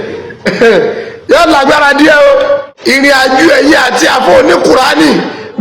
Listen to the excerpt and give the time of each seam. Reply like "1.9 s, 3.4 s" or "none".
2.7 s